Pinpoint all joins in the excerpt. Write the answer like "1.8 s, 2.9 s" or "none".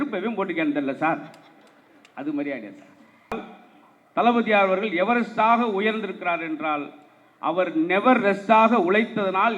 3.3 s